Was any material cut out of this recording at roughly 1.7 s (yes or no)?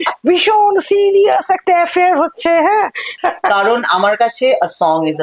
no